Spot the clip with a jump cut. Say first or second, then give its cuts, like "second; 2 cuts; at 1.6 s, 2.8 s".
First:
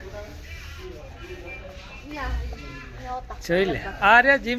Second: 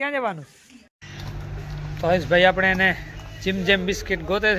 second; 1 cut; at 1.0 s